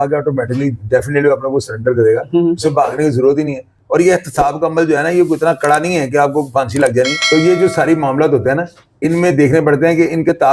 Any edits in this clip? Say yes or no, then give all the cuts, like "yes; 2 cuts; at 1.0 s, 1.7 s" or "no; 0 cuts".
no; 0 cuts